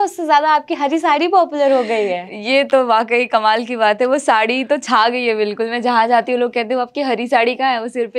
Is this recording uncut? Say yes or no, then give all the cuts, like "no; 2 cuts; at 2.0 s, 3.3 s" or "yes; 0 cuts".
yes; 0 cuts